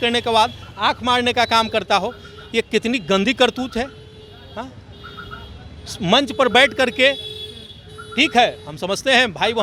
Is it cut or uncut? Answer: uncut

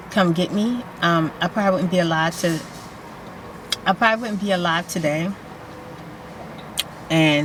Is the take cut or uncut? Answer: uncut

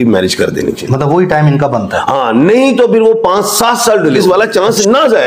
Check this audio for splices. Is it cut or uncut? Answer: cut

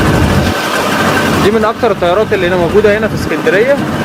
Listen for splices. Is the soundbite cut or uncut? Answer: uncut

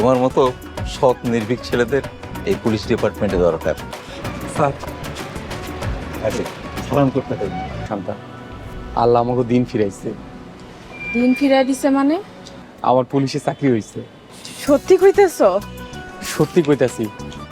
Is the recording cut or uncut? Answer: cut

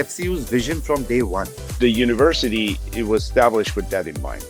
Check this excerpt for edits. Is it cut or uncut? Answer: cut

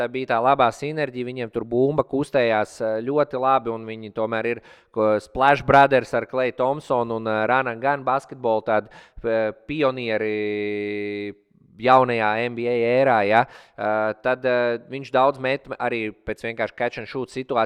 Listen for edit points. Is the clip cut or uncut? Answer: uncut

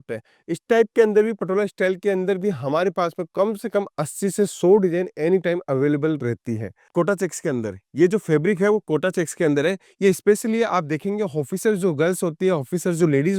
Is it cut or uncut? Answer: cut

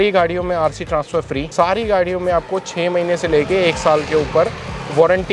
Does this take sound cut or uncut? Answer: cut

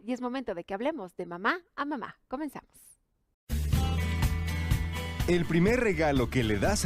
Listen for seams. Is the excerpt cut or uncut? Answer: cut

